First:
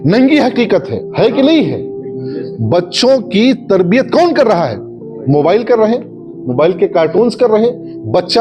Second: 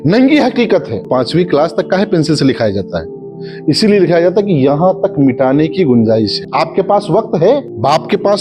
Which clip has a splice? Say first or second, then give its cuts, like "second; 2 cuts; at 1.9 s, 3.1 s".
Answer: second; 2 cuts; at 1.1 s, 6.4 s